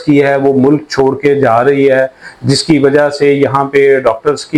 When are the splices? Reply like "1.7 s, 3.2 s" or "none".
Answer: none